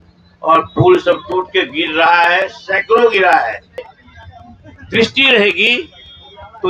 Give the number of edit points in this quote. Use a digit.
1